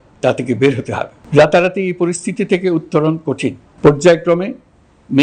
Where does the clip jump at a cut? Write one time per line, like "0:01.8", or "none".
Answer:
0:01.1
0:03.6